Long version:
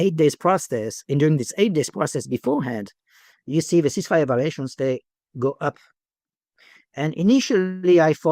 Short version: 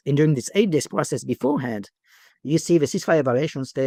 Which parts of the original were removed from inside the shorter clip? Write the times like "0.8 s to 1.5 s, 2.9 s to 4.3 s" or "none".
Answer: none